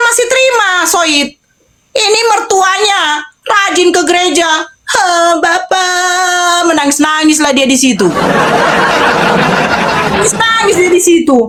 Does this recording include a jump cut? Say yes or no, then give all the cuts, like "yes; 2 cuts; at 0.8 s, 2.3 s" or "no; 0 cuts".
no; 0 cuts